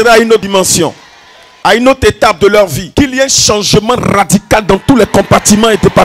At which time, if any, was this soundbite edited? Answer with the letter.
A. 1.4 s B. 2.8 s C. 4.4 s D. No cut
B